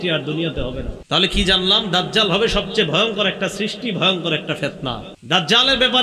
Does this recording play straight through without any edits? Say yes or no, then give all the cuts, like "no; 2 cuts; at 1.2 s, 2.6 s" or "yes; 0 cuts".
no; 2 cuts; at 1.0 s, 5.1 s